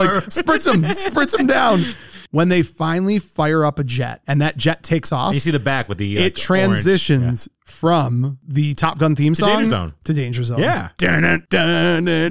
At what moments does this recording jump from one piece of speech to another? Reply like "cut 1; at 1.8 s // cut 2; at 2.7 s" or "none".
cut 1; at 2.2 s